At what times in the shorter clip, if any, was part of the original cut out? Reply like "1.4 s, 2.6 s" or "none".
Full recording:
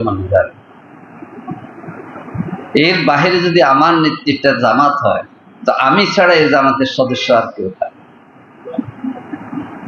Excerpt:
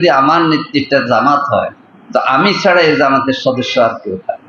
none